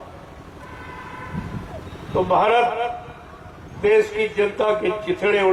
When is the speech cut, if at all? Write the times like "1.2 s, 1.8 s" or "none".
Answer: none